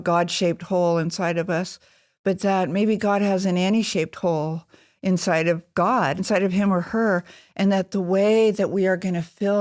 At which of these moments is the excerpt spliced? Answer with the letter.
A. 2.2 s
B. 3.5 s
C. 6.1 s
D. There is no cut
C